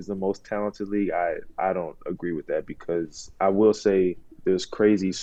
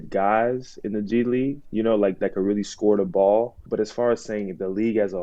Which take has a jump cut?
second; 1 cut; at 3.6 s

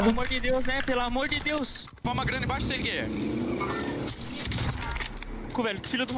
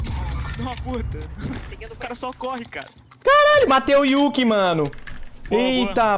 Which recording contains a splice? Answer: first; 1 cut; at 2.0 s

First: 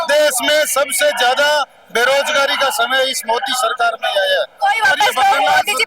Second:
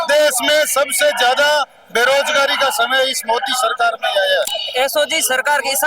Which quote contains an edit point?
second; 1 cut; at 4.5 s

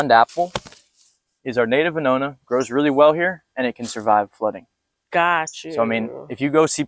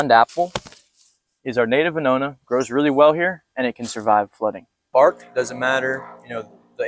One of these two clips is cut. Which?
second; 1 cut; at 4.8 s

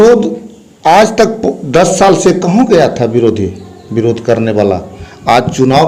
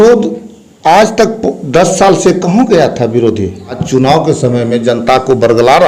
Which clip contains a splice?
second; 1 cut; at 3.8 s

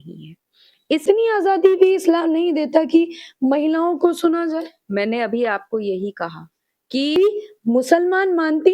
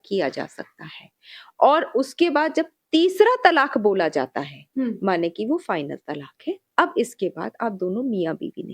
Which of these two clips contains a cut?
first; 2 cuts; at 1.0 s, 7.2 s

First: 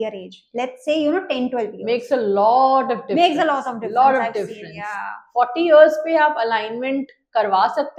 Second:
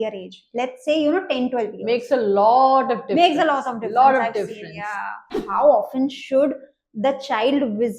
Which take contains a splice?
second; 1 cut; at 5.3 s

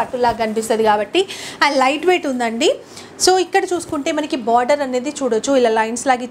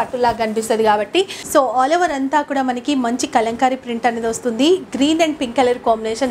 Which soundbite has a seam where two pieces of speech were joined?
second; 1 cut; at 1.4 s

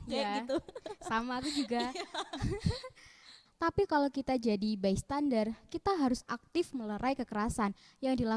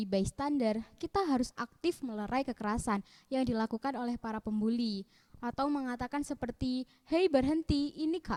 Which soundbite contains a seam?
first; 1 cut; at 3.5 s

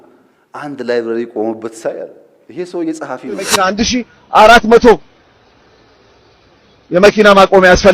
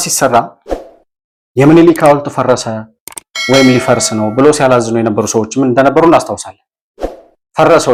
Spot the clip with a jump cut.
first; 1 cut; at 3.6 s

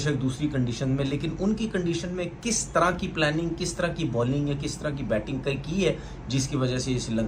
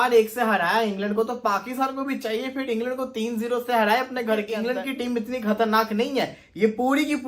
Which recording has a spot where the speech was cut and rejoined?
second; 1 cut; at 4.6 s

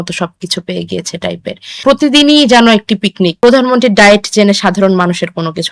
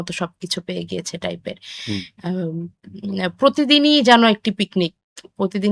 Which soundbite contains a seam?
first; 2 cuts; at 1.8 s, 3.3 s

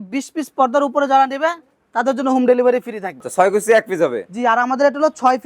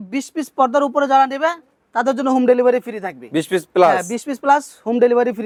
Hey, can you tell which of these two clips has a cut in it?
first; 1 cut; at 3.3 s

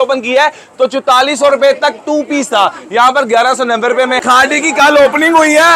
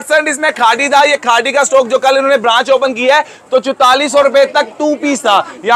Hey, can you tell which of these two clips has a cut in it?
first; 1 cut; at 4.2 s

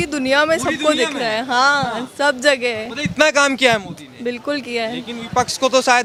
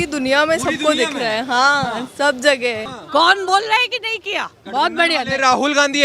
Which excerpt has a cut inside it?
second; 1 cut; at 2.9 s

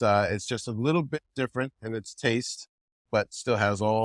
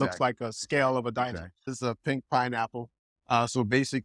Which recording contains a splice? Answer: second; 1 cut; at 1.6 s

